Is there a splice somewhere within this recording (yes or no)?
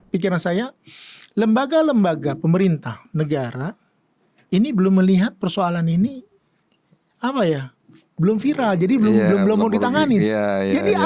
no